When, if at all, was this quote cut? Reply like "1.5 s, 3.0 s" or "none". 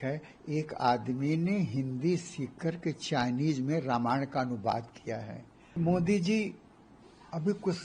5.8 s